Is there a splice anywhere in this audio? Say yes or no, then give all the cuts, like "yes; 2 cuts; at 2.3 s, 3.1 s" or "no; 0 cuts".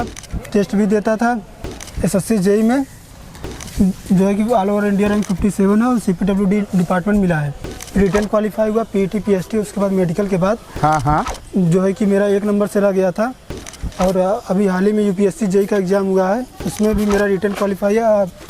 yes; 2 cuts; at 1.8 s, 7.8 s